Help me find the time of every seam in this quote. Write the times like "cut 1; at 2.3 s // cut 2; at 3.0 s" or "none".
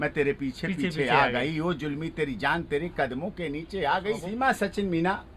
cut 1; at 4.2 s